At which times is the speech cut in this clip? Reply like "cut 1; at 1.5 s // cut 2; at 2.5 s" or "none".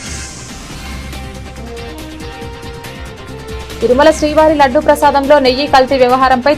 cut 1; at 3.8 s